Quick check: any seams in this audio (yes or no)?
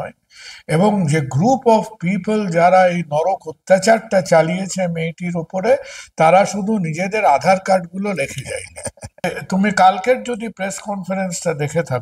yes